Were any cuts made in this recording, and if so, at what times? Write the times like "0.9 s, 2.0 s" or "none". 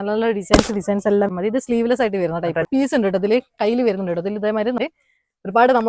1.3 s, 2.7 s, 4.8 s